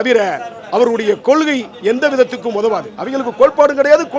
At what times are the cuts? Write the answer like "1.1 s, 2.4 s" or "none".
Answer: none